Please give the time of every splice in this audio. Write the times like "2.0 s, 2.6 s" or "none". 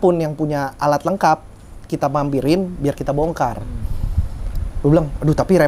none